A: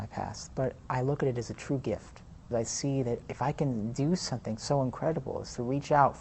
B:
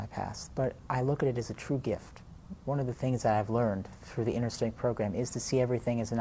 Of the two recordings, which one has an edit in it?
A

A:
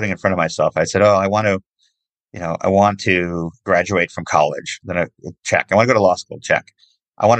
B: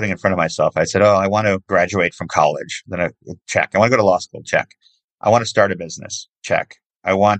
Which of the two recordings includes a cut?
B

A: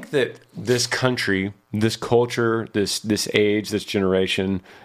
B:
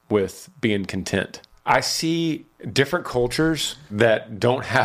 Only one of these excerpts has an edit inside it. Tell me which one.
B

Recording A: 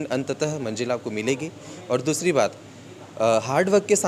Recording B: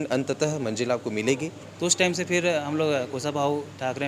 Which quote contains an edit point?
B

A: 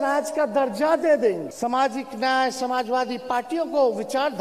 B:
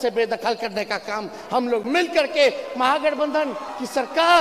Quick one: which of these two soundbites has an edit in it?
A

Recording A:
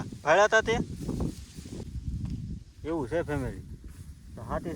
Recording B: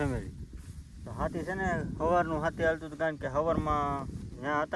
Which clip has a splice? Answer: A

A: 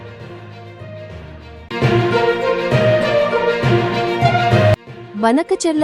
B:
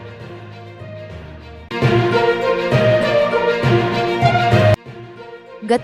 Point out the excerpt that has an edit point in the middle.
A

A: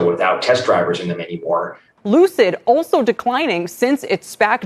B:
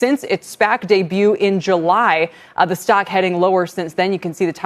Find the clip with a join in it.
A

